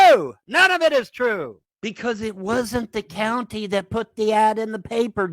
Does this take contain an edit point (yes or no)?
yes